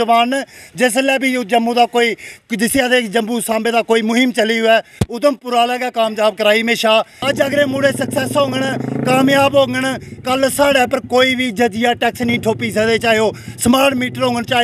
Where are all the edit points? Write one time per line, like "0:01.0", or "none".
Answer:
0:07.2

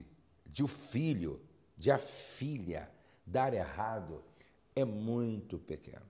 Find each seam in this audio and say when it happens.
0:03.5

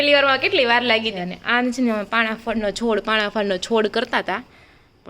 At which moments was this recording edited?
0:01.1

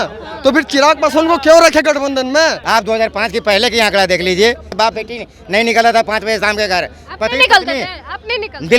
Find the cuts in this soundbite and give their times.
0:02.6
0:04.7

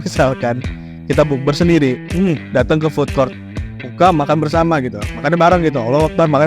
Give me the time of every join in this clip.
0:03.5

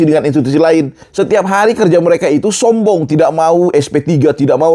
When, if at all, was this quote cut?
0:01.0

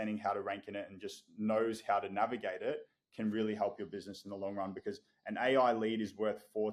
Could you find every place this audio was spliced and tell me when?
none

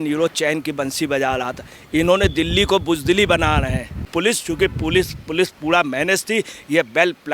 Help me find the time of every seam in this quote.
0:04.1

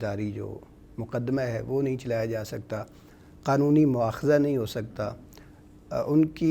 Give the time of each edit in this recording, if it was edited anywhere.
none

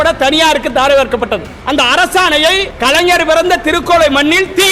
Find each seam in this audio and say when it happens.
0:01.5
0:02.7

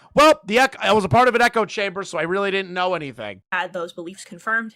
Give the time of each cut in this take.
none

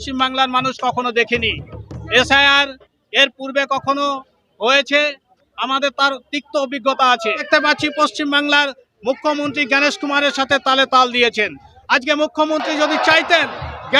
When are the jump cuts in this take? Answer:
0:07.5

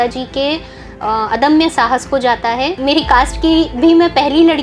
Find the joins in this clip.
0:02.8

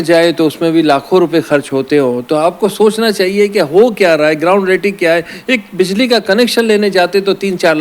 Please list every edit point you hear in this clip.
none

